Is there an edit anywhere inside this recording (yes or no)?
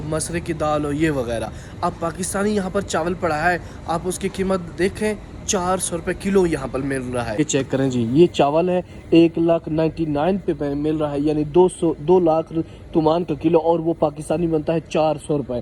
no